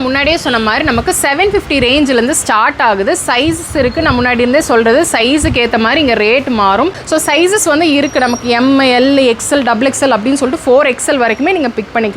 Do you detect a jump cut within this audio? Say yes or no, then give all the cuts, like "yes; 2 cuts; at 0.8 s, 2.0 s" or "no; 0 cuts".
yes; 1 cut; at 7.0 s